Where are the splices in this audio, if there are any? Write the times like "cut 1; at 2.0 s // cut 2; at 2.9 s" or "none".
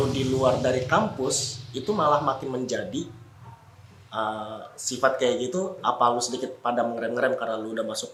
none